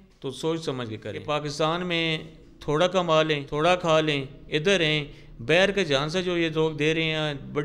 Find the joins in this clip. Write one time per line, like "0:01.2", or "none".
0:01.2
0:03.5